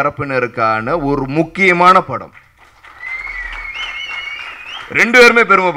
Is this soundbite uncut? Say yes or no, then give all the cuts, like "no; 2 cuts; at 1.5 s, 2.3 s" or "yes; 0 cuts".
yes; 0 cuts